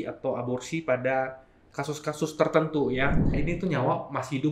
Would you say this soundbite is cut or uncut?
cut